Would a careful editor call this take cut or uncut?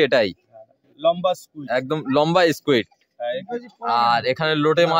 uncut